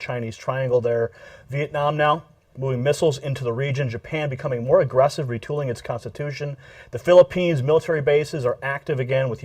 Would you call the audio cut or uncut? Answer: cut